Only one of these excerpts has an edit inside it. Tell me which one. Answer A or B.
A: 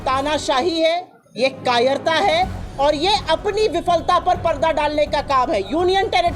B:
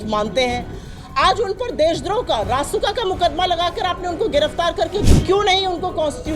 B